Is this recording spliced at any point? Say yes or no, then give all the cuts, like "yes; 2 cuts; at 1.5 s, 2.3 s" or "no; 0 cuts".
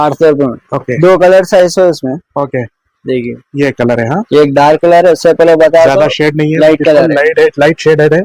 no; 0 cuts